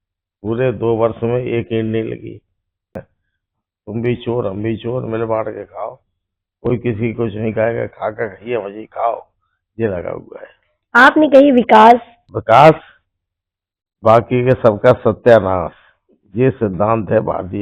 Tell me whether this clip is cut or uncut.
cut